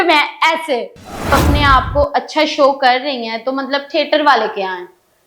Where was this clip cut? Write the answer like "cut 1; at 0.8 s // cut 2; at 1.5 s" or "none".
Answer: cut 1; at 1.3 s